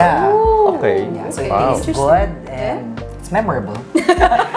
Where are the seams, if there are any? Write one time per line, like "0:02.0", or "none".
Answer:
none